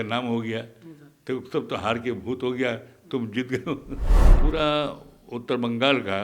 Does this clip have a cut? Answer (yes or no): yes